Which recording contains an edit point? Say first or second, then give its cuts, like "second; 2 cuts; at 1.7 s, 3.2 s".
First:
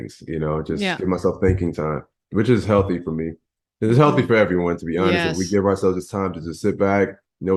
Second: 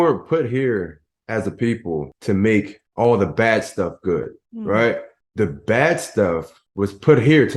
second; 5 cuts; at 2.1 s, 2.8 s, 4.4 s, 5.2 s, 6.6 s